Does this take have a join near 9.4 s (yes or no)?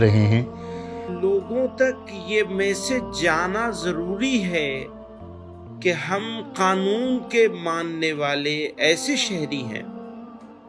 no